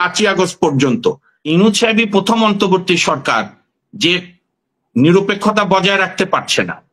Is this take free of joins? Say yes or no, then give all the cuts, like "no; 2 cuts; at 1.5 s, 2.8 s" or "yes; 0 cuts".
no; 1 cut; at 1.3 s